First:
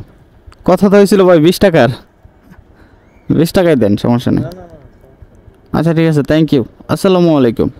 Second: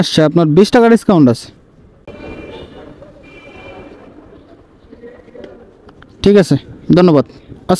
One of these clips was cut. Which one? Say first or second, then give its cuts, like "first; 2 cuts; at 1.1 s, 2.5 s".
second; 1 cut; at 2.0 s